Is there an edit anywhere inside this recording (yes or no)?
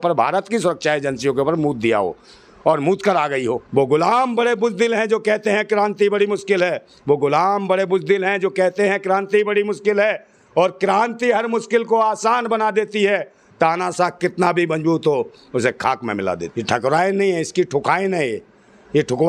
yes